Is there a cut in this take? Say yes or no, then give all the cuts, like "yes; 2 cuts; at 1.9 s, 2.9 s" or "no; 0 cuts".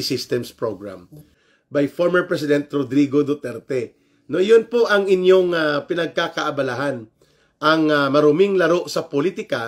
yes; 1 cut; at 1.3 s